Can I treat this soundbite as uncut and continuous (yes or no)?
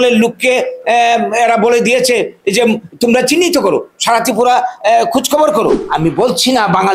no